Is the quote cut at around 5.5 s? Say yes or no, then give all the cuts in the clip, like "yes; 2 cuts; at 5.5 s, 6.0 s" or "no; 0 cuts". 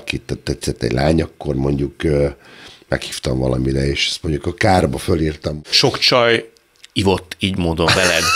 yes; 1 cut; at 5.5 s